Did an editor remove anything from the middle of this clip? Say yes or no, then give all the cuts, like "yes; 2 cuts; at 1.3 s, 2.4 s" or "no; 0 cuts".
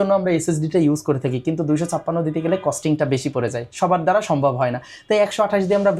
no; 0 cuts